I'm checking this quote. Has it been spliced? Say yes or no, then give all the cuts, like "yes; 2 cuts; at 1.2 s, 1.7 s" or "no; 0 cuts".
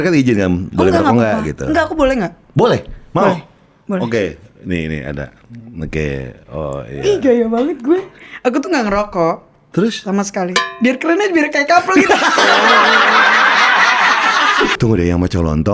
yes; 1 cut; at 14.7 s